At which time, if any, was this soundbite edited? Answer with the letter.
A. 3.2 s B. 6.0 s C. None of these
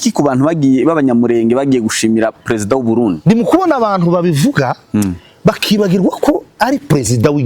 A